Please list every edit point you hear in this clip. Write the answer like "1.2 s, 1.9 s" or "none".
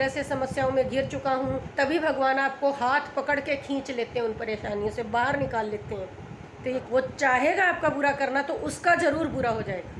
1.6 s, 6.8 s